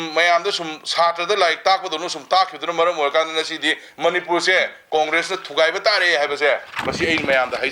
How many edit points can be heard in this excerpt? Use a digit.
0